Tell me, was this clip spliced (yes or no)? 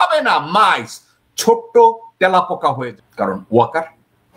yes